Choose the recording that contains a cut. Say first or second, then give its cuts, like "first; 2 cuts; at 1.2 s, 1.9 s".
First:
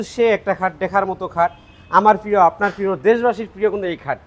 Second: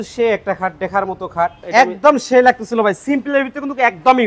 second; 1 cut; at 1.6 s